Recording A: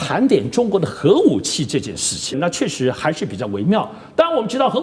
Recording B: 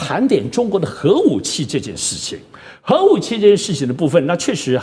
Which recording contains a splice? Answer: A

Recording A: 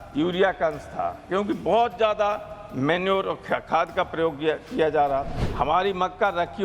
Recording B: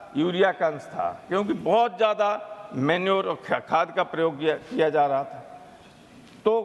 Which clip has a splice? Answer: A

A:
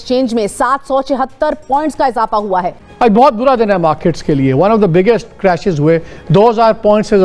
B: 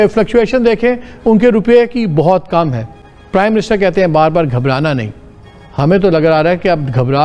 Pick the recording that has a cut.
A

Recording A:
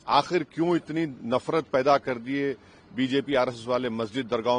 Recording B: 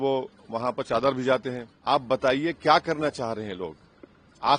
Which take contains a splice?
B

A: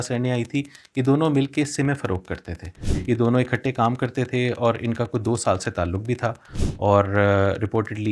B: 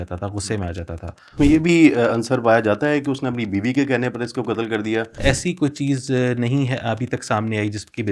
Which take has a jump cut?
B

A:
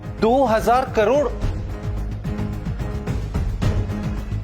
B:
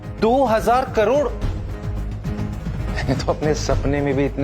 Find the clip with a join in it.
B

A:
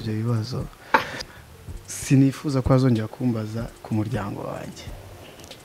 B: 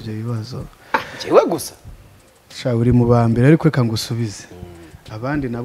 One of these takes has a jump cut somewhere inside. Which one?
A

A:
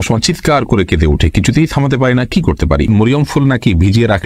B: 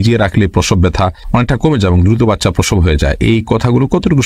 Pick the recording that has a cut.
A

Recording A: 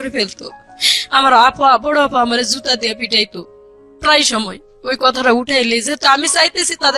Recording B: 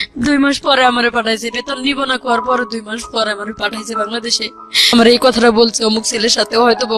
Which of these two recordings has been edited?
B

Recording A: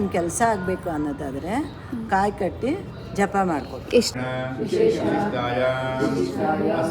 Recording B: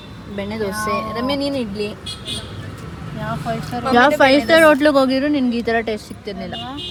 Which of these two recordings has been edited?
A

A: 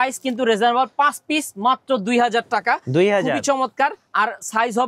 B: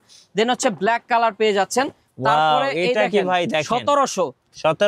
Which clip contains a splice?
B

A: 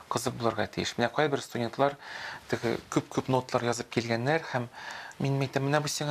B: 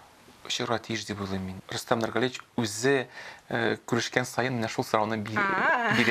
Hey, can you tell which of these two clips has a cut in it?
B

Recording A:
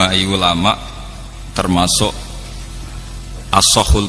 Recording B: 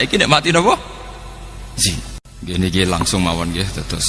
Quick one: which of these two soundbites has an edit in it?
B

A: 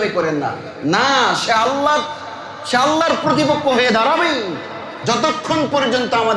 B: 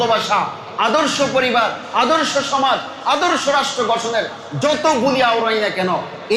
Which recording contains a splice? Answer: A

